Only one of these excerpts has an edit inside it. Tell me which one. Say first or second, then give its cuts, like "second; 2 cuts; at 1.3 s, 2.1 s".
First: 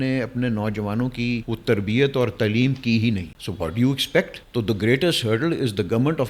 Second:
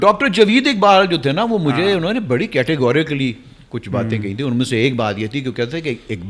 first; 3 cuts; at 1.4 s, 3.3 s, 4.4 s